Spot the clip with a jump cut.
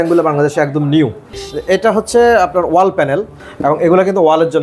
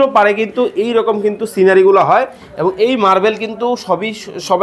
first; 2 cuts; at 1.4 s, 3.4 s

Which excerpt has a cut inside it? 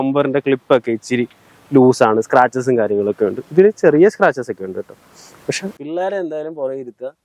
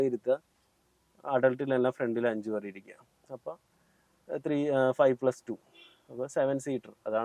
first; 1 cut; at 5.8 s

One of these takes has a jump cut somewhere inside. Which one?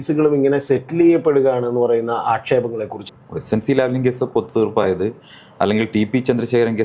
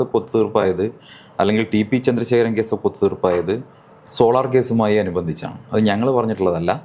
first; 1 cut; at 3.0 s

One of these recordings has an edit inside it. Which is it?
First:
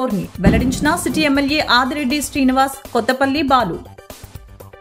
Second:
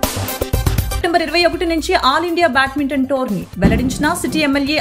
second; 1 cut; at 1.0 s

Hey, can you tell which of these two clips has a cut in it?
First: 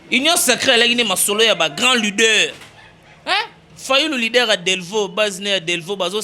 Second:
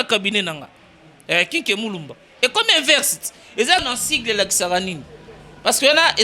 second; 1 cut; at 3.8 s

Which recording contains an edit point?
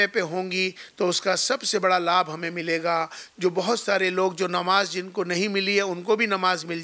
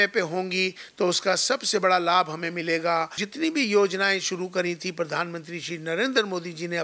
second; 1 cut; at 3.2 s

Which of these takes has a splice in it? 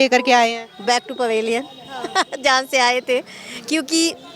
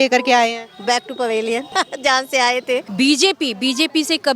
second; 2 cuts; at 1.7 s, 2.9 s

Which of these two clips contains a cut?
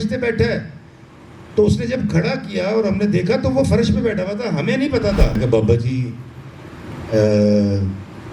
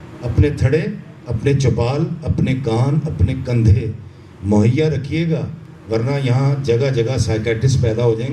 first; 1 cut; at 5.4 s

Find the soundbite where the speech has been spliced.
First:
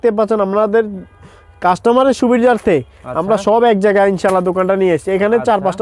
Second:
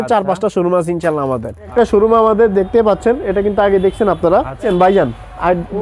second; 2 cuts; at 1.7 s, 4.6 s

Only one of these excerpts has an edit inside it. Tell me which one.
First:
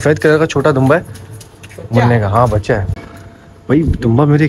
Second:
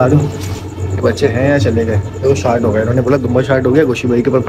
first; 1 cut; at 3.0 s

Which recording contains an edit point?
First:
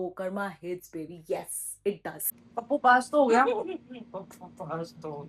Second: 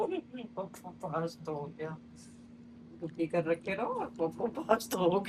first; 1 cut; at 2.3 s

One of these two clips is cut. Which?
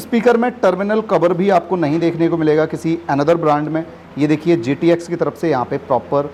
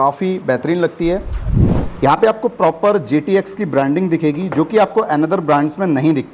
second; 1 cut; at 1.4 s

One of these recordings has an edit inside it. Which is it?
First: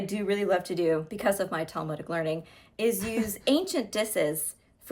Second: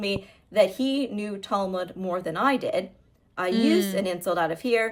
first; 1 cut; at 1.1 s

